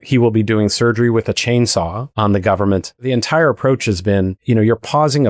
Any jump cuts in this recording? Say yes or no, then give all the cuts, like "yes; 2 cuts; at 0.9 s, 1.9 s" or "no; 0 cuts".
yes; 3 cuts; at 2.0 s, 2.9 s, 4.4 s